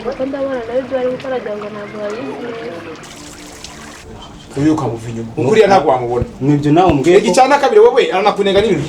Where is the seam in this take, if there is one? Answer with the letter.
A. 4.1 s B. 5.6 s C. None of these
A